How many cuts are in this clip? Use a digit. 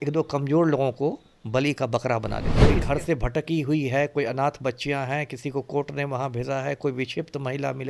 1